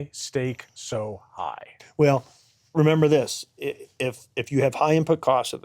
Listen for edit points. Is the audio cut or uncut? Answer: cut